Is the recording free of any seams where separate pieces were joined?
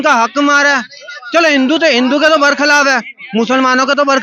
yes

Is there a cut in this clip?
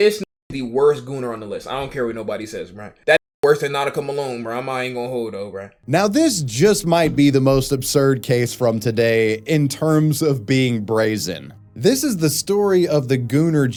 no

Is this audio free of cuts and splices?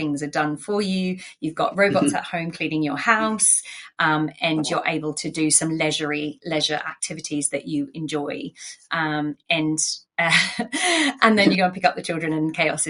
yes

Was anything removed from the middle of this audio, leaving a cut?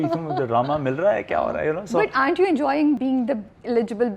yes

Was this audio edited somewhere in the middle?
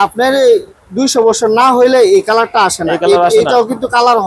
no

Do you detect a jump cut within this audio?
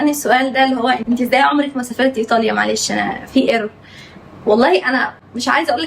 yes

